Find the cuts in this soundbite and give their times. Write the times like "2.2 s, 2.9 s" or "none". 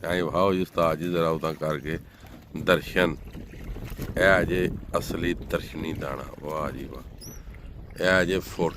none